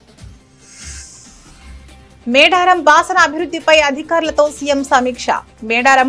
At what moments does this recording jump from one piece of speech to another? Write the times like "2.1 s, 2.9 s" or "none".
2.2 s

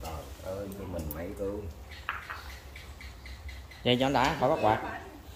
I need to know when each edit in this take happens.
none

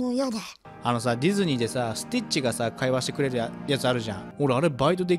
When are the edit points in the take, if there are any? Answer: 4.2 s

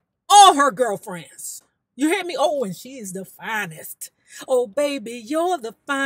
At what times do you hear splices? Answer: none

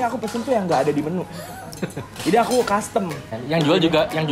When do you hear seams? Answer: 3.3 s

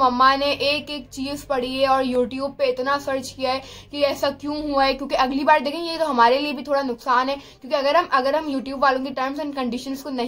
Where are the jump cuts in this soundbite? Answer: none

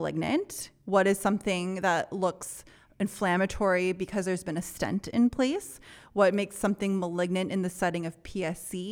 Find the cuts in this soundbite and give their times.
none

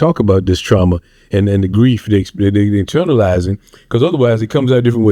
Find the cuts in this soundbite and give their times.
none

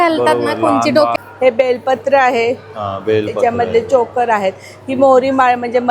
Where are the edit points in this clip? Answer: 1.1 s

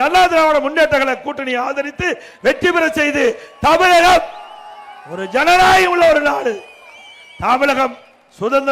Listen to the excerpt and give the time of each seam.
none

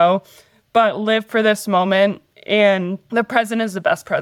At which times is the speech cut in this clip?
3.0 s

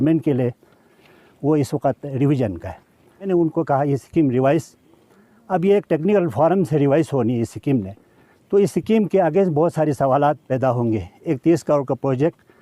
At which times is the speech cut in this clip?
1.0 s, 3.3 s, 10.5 s

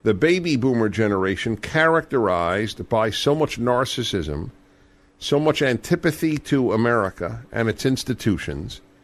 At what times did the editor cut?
none

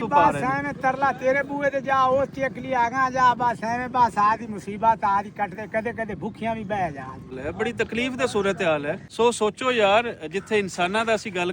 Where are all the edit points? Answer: 7.4 s, 9.0 s

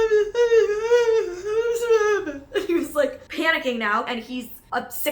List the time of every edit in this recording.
4.1 s

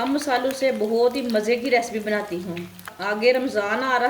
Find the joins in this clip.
2.9 s

